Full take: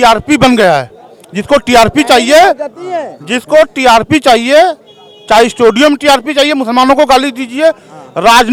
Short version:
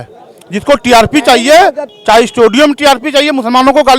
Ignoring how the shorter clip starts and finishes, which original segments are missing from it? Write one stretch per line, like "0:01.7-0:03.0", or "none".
0:02.7-0:05.1